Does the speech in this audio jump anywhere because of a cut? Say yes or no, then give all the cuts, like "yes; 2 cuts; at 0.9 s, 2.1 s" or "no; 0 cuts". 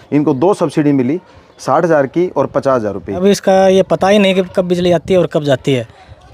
yes; 1 cut; at 3.2 s